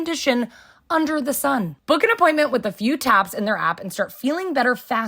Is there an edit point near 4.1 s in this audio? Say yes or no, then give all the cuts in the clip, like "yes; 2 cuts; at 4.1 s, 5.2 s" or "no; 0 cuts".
no; 1 cut; at 1.7 s